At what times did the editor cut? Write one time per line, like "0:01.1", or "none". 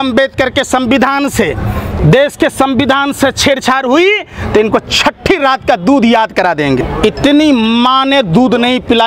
0:06.8